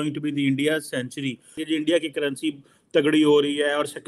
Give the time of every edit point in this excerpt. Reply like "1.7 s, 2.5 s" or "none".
1.6 s